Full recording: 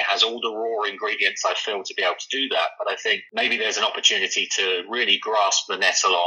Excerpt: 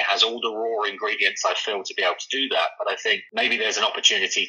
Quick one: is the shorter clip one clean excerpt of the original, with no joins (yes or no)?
yes